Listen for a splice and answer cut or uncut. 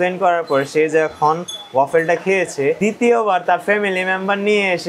uncut